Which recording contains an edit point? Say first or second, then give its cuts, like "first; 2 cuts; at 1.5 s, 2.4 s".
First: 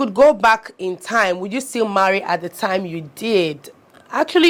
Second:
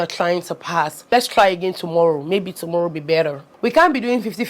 second; 2 cuts; at 1.0 s, 3.5 s